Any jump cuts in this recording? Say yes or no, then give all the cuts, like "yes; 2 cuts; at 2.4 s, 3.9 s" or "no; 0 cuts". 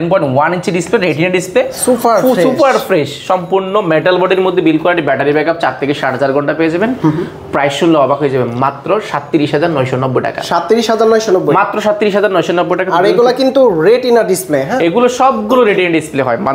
no; 0 cuts